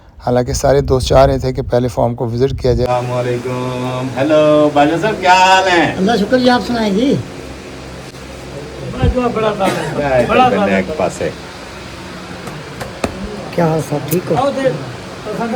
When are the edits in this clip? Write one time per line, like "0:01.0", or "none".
0:02.9